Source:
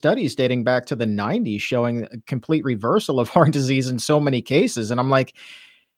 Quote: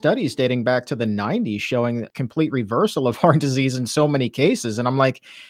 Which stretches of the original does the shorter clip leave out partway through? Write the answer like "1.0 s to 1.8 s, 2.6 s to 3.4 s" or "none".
2.1 s to 2.3 s